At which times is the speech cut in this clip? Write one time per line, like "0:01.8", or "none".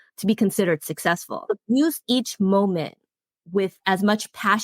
0:01.4